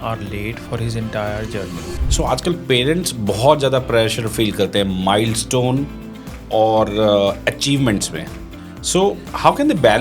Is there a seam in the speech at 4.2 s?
no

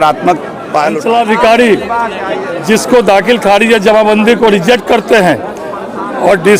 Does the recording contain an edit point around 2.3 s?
no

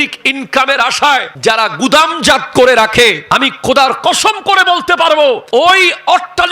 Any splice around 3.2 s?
yes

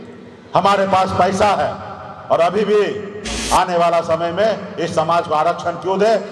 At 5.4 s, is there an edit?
no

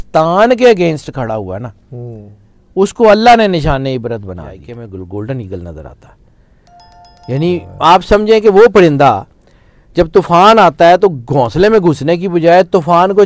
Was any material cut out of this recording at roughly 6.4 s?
no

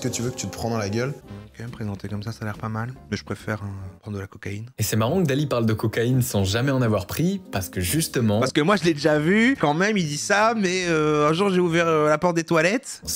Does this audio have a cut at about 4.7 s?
yes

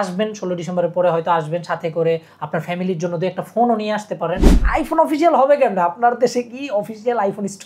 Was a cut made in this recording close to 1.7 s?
no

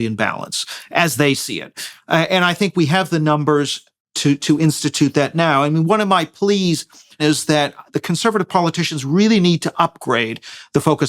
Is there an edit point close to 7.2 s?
yes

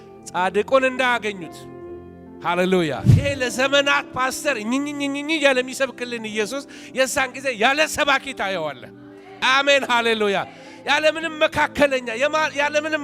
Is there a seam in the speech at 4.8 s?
no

